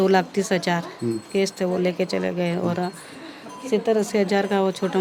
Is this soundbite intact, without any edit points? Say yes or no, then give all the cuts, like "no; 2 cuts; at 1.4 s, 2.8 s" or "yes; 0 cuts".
yes; 0 cuts